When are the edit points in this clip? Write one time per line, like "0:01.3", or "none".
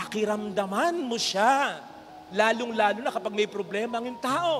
0:02.2